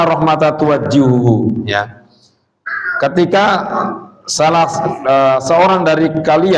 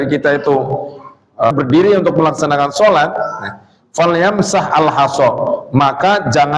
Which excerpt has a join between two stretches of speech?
second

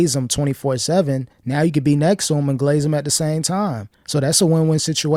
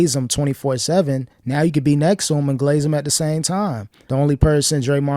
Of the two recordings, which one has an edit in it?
second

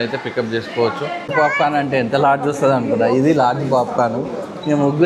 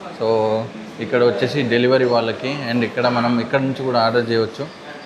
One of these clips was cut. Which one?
first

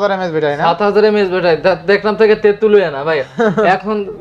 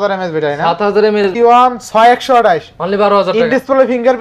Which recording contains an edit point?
second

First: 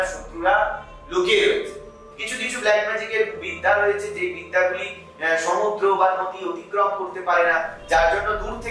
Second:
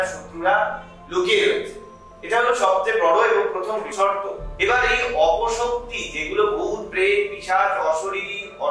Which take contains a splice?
first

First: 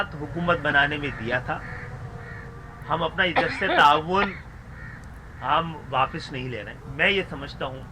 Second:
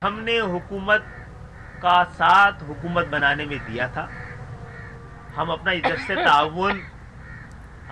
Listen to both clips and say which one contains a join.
first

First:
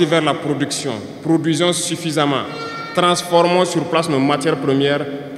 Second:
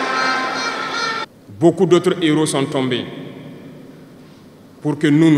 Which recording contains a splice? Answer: second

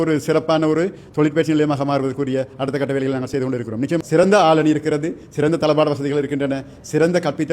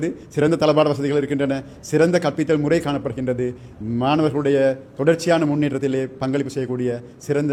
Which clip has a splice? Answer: first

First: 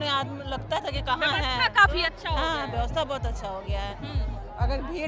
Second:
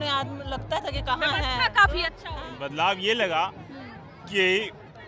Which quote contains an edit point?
second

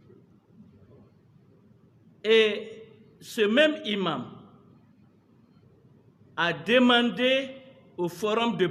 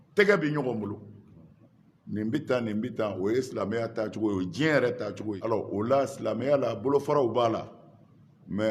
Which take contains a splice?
second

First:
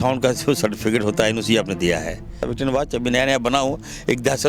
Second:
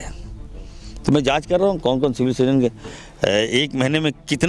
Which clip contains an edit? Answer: first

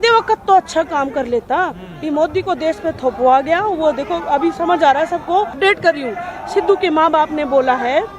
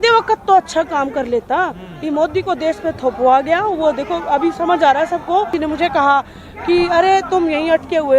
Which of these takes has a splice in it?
second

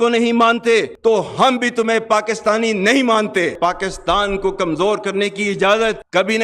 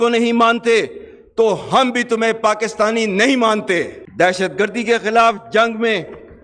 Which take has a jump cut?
first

